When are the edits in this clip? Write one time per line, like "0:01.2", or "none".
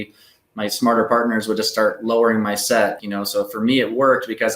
0:03.0